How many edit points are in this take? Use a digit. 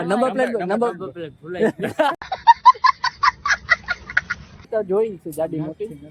1